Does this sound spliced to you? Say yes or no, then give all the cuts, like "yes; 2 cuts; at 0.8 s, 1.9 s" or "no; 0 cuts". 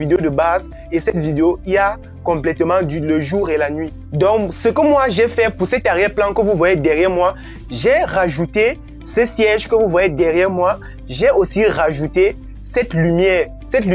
no; 0 cuts